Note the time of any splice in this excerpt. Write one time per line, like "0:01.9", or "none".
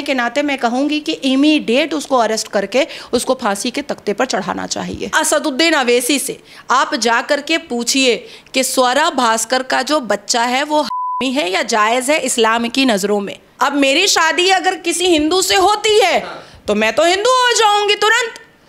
0:05.1
0:13.4